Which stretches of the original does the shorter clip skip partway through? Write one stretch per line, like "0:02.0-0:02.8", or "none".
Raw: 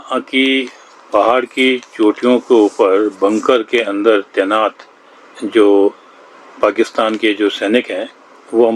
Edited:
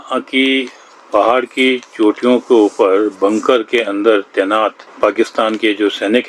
0:04.8-0:06.4